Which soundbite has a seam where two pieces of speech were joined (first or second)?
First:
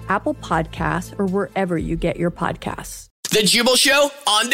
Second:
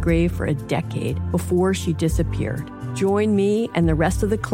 first